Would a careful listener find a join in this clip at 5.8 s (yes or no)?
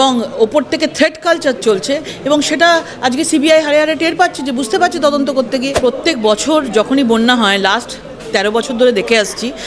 yes